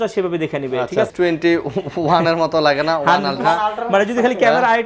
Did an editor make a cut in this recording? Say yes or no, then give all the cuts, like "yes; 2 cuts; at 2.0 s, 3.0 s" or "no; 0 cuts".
yes; 1 cut; at 1.1 s